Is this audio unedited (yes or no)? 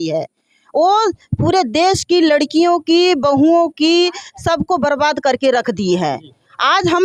yes